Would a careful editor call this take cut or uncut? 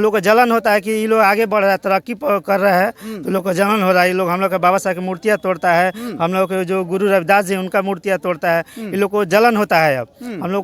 uncut